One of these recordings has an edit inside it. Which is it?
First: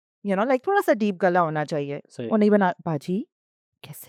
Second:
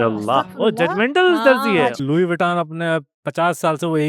second; 1 cut; at 2.0 s

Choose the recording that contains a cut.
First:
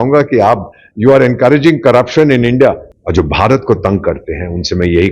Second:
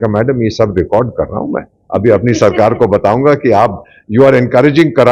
first; 1 cut; at 2.9 s

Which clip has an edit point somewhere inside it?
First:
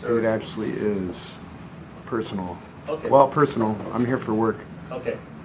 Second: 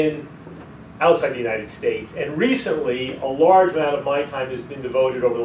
second; 1 cut; at 2.3 s

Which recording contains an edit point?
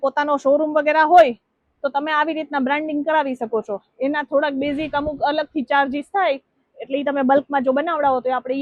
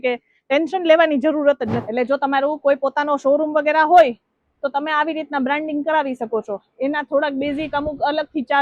second; 1 cut; at 1.8 s

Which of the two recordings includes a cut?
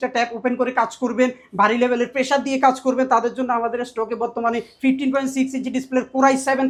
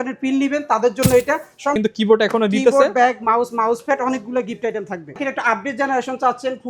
second; 2 cuts; at 1.8 s, 5.1 s

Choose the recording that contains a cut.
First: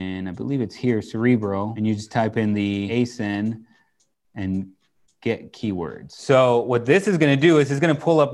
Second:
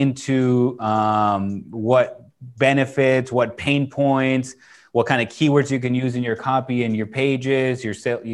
first; 3 cuts; at 1.7 s, 2.9 s, 6.1 s

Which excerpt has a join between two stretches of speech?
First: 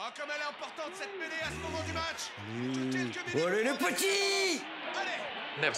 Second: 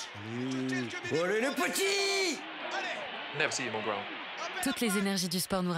second; 1 cut; at 4.6 s

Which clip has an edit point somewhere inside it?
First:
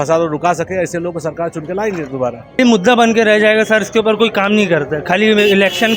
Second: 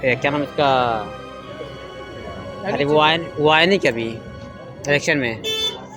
first; 1 cut; at 2.6 s

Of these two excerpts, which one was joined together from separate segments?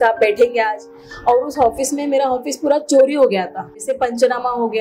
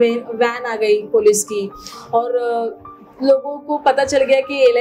first; 1 cut; at 3.9 s

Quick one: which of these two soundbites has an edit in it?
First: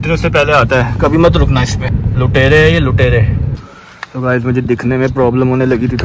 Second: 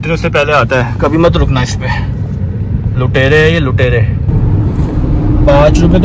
first; 2 cuts; at 1.8 s, 3.5 s

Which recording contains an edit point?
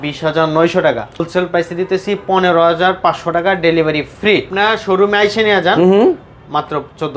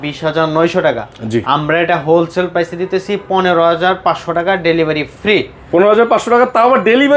first; 2 cuts; at 1.3 s, 4.5 s

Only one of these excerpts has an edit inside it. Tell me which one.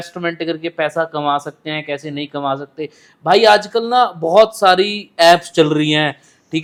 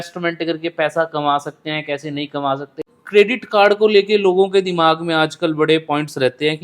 second; 1 cut; at 2.9 s

